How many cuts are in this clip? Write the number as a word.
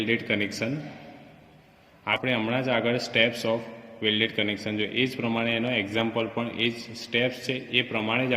one